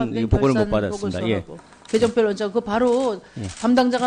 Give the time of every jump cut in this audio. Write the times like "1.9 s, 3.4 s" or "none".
2.0 s